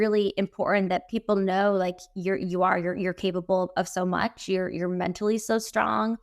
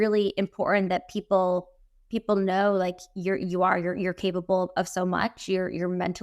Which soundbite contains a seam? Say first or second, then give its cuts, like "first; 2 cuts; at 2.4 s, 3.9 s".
first; 1 cut; at 1.1 s